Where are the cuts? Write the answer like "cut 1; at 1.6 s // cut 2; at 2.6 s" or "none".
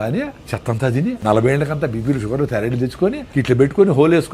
cut 1; at 1.0 s // cut 2; at 3.2 s